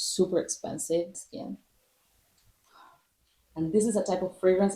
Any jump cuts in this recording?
yes; 2 cuts; at 1.2 s, 3.4 s

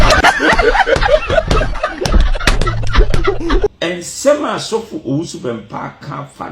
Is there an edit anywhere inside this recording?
yes; 1 cut; at 3.7 s

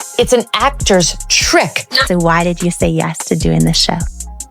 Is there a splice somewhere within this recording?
yes; 1 cut; at 1.9 s

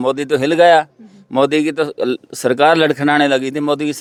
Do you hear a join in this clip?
no; 0 cuts

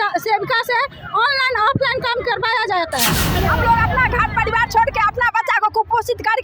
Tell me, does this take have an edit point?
yes; 1 cut; at 3.3 s

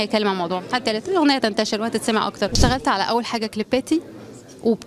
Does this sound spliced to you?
yes; 1 cut; at 2.5 s

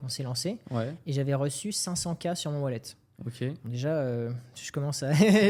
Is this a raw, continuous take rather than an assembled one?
yes; 0 cuts

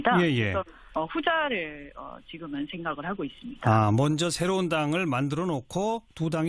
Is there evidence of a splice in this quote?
yes; 1 cut; at 4.2 s

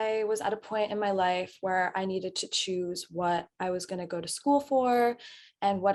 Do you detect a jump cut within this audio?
no; 0 cuts

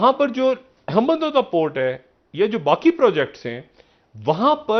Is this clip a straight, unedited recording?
yes; 0 cuts

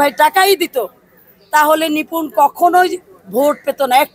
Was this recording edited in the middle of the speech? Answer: no; 0 cuts

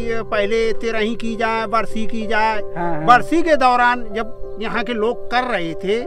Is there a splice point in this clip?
no; 0 cuts

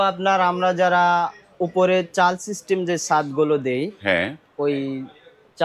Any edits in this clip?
no; 0 cuts

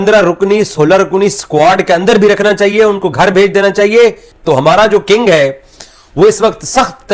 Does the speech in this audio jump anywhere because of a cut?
yes; 1 cut; at 4.3 s

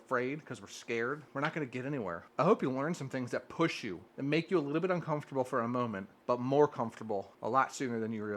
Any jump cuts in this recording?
yes; 5 cuts; at 1.3 s, 2.2 s, 4.0 s, 6.1 s, 7.3 s

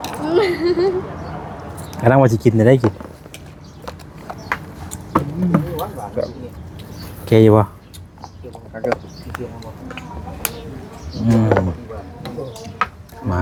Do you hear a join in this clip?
no; 0 cuts

